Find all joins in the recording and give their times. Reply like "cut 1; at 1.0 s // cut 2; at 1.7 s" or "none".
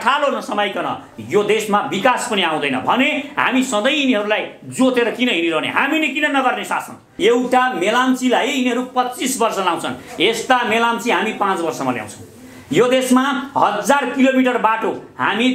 cut 1; at 7.0 s